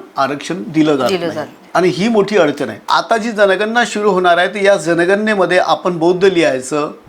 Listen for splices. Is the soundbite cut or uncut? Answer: cut